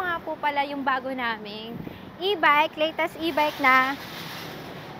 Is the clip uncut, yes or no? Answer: yes